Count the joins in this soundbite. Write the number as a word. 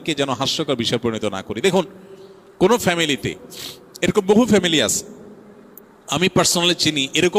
zero